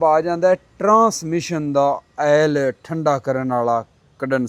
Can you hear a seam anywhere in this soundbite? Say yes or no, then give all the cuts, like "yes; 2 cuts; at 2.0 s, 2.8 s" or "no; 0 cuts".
no; 0 cuts